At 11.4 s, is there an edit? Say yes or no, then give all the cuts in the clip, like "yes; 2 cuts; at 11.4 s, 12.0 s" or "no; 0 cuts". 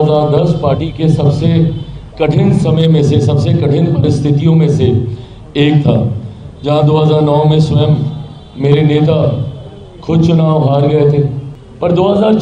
yes; 1 cut; at 11.4 s